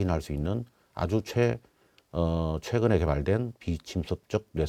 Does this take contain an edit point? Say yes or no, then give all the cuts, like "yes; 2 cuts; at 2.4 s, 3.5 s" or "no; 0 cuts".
no; 0 cuts